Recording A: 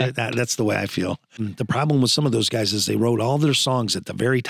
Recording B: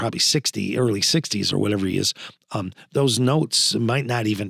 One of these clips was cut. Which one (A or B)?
A